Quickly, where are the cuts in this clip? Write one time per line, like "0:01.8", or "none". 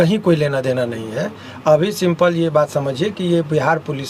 none